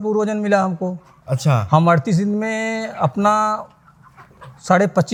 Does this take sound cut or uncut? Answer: uncut